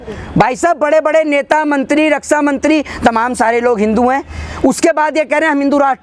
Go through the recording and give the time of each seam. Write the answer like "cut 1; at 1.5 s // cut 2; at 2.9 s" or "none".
none